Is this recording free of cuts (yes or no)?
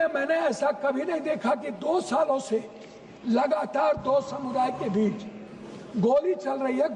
yes